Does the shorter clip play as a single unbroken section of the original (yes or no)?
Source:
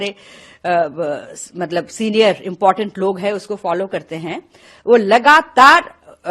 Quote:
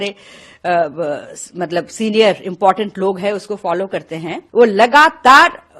no